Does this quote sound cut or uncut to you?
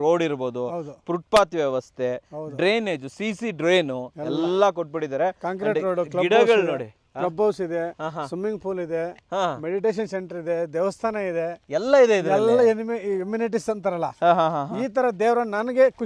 uncut